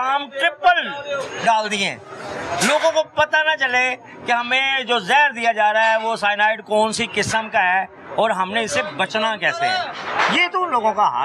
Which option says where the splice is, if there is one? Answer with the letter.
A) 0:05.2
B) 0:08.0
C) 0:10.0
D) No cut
D